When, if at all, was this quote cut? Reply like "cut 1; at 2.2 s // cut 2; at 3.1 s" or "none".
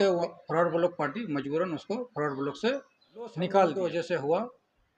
cut 1; at 3.8 s

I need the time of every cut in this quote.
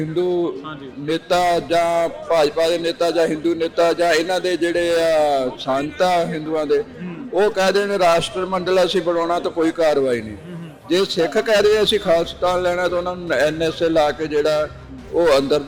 none

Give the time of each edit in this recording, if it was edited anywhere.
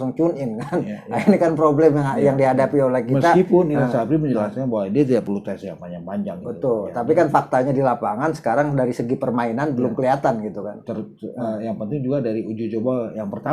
none

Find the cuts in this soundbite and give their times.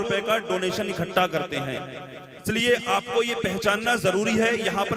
cut 1; at 2.4 s

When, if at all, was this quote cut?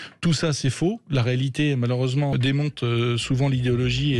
cut 1; at 2.3 s

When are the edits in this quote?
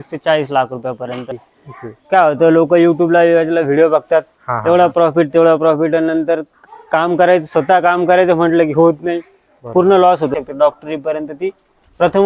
cut 1; at 1.3 s // cut 2; at 10.3 s

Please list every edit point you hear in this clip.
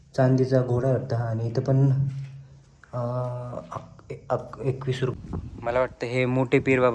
cut 1; at 5.1 s

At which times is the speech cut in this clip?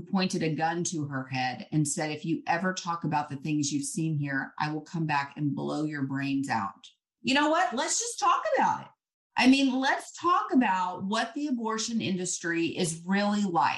cut 1; at 7.1 s

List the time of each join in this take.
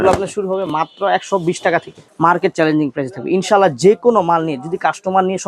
cut 1; at 2.0 s

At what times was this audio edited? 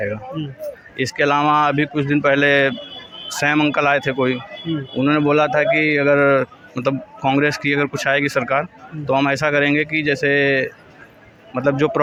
none

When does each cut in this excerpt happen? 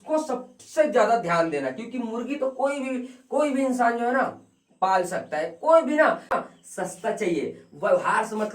cut 1; at 6.3 s

